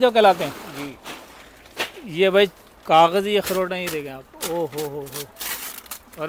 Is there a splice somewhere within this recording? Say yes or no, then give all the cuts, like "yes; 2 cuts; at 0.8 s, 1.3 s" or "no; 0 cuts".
no; 0 cuts